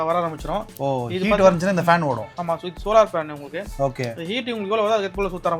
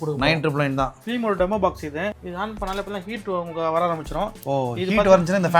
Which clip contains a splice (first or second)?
second